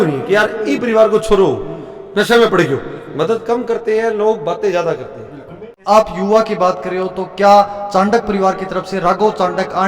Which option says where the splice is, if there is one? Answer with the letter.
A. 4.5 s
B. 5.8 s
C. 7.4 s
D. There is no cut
B